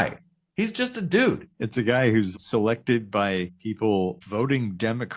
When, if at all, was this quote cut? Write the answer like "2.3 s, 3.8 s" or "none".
1.5 s, 2.3 s, 3.5 s, 4.2 s

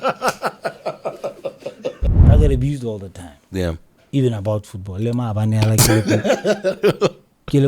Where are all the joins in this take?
2.1 s

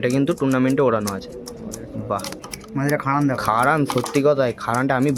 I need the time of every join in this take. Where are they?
none

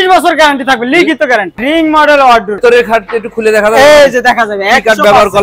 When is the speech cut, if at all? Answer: 1.6 s, 2.6 s

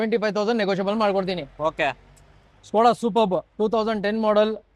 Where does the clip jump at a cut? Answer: none

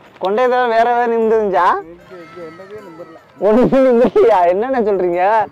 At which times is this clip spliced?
none

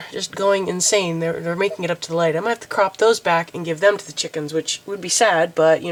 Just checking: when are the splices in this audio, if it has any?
none

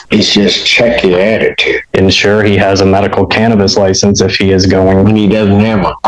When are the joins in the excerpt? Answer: 1.9 s

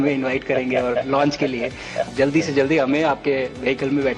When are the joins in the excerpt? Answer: 2.1 s

